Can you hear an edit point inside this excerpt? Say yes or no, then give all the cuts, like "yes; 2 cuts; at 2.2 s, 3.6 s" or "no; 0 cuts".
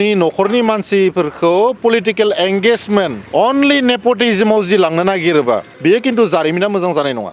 yes; 2 cuts; at 3.2 s, 5.7 s